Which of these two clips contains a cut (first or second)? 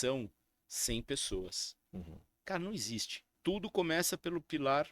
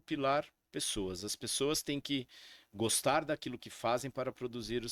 first